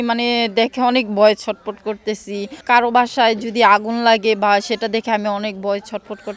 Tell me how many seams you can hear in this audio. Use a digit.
1